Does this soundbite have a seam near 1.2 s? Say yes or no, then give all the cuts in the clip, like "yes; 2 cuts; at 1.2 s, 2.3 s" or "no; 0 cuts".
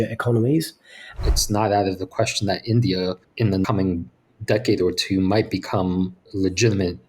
yes; 3 cuts; at 1.2 s, 3.6 s, 6.2 s